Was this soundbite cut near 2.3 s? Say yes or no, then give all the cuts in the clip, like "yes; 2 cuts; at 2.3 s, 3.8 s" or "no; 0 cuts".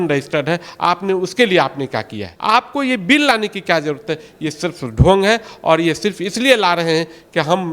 yes; 1 cut; at 2.3 s